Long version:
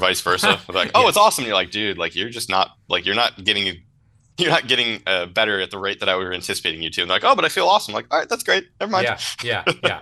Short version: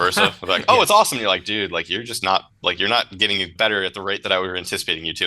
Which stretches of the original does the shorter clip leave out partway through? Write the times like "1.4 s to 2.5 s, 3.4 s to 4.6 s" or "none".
3.8 s to 5.3 s